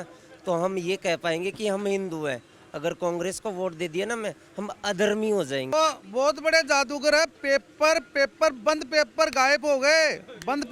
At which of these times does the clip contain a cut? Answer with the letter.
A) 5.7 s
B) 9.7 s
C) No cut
A